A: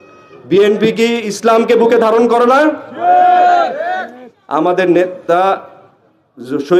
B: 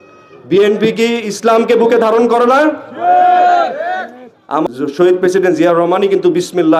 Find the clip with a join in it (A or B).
B